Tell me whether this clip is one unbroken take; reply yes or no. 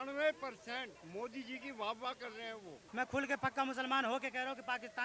no